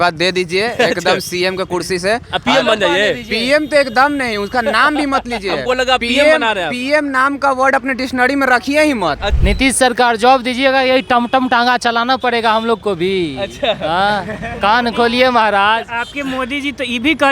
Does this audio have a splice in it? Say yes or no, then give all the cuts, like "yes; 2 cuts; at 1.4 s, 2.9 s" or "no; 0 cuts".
yes; 1 cut; at 9.3 s